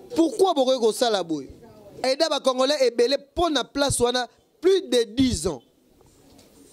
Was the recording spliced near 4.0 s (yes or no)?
no